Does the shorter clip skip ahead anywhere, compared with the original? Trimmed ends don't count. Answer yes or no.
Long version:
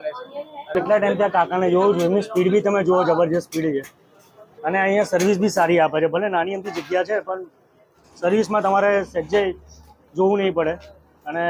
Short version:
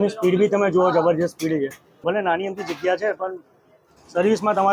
yes